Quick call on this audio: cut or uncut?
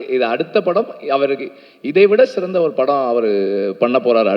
uncut